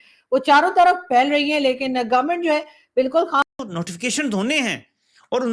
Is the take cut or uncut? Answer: cut